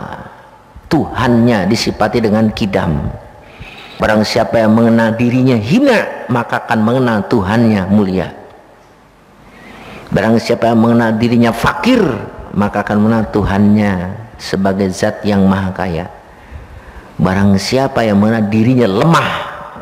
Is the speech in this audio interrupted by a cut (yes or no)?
yes